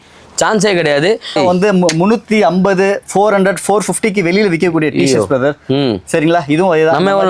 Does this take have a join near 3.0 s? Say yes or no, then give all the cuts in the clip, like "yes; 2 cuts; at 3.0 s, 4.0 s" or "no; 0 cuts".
no; 1 cut; at 1.4 s